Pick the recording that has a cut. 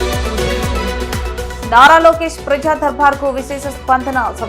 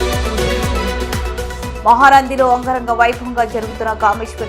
first; 1 cut; at 1.6 s

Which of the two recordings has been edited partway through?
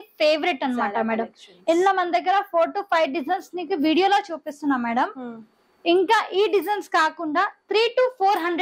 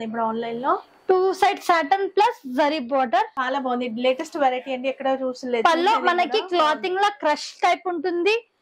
second; 1 cut; at 3.4 s

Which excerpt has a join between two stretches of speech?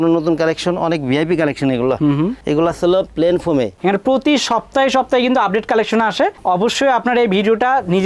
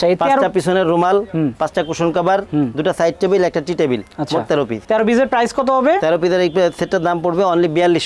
first; 1 cut; at 3.8 s

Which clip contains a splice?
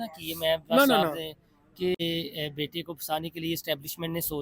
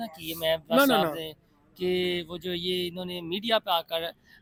first; 1 cut; at 2.0 s

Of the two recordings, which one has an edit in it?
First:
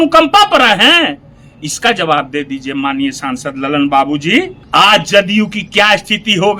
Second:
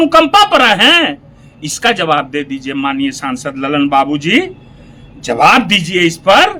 first; 1 cut; at 4.6 s

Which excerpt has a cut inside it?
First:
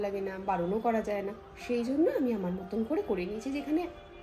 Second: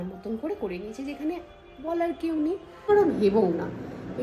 second; 1 cut; at 2.9 s

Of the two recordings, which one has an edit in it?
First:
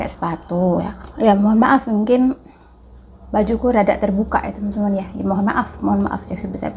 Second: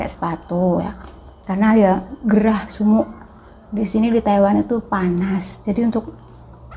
first; 1 cut; at 1.0 s

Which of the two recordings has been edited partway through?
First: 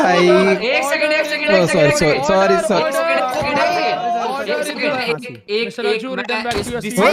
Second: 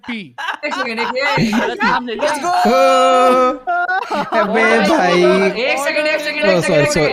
first; 1 cut; at 5.0 s

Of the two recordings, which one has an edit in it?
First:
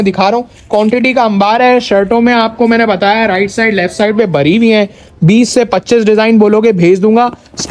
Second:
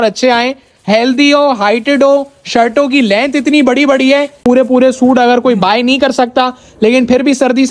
second; 1 cut; at 4.4 s

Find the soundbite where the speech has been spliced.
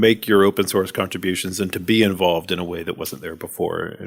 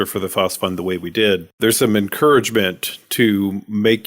second; 1 cut; at 1.5 s

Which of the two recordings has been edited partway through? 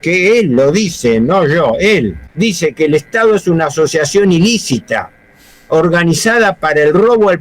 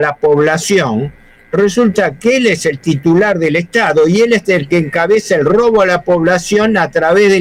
first; 1 cut; at 2.2 s

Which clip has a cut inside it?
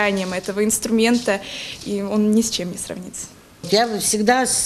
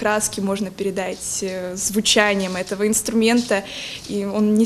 first; 1 cut; at 3.6 s

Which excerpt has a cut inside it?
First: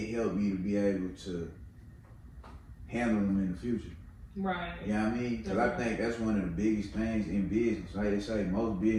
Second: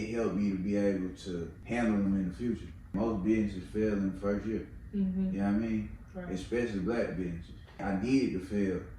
second; 3 cuts; at 1.5 s, 2.9 s, 7.8 s

